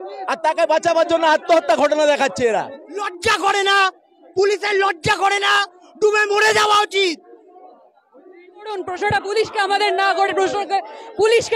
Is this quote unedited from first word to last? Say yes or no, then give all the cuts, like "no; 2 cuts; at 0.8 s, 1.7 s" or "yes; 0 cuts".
no; 2 cuts; at 3.1 s, 8.7 s